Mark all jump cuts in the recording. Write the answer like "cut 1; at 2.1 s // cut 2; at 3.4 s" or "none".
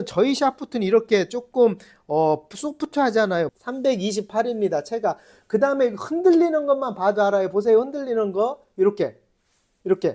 cut 1; at 3.6 s